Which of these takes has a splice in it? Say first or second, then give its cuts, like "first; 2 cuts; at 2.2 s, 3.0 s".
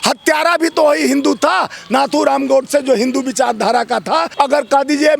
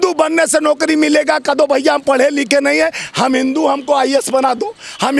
first; 1 cut; at 4.3 s